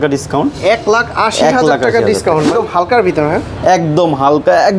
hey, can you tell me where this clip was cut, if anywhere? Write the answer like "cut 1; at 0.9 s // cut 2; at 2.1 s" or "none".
cut 1; at 2.5 s